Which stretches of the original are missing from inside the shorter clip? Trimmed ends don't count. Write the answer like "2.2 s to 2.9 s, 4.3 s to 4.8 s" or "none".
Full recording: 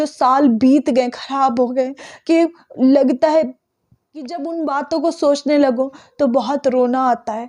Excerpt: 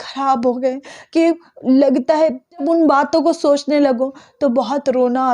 3.6 s to 4.3 s